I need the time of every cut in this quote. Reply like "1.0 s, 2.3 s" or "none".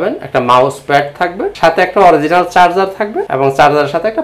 1.5 s, 3.2 s

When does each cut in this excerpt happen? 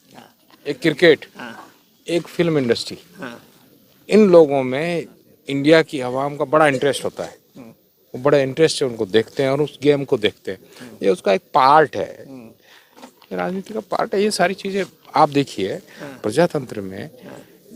none

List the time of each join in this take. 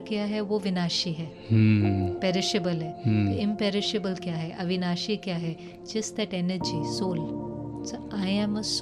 none

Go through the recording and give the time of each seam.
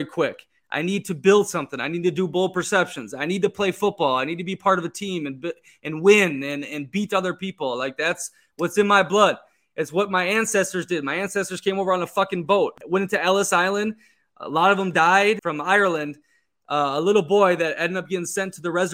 12.8 s, 15.4 s

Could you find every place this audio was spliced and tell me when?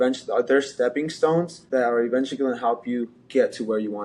1.6 s

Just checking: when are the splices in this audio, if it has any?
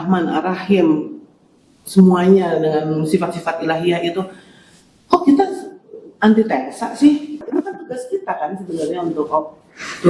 7.4 s

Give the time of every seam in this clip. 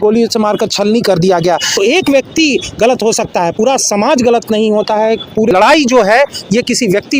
1.8 s, 5.5 s

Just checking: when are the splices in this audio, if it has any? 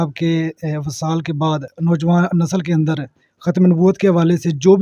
1.7 s

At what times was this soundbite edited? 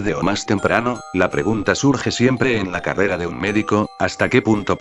3.4 s

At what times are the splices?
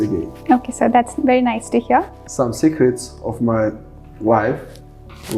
2.2 s

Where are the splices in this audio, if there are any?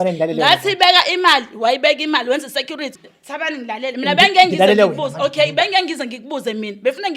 3.0 s

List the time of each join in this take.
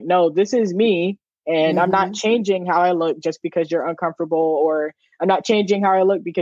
none

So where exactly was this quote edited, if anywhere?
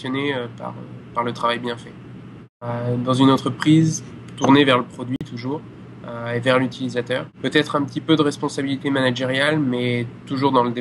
2.7 s, 7.3 s

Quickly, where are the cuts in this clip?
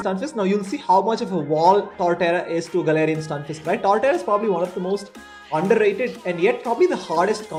none

